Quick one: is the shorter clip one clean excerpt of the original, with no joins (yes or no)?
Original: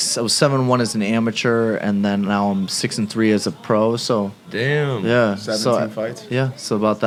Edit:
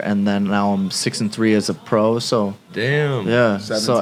yes